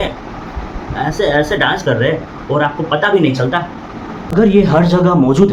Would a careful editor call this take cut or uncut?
cut